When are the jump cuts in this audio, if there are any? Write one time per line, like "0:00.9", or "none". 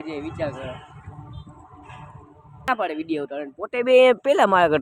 0:02.7